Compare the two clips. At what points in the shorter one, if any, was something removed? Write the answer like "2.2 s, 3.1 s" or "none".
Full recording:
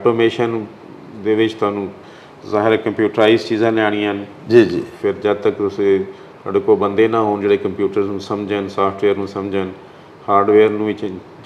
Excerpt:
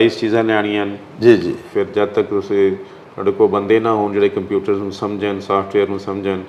none